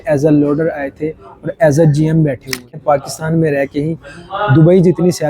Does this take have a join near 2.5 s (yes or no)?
yes